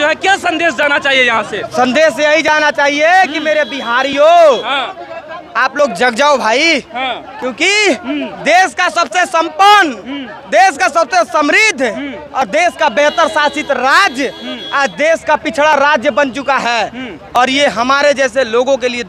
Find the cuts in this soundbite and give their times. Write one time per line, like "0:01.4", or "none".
none